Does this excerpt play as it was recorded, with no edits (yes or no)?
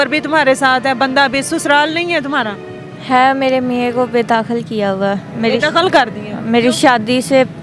yes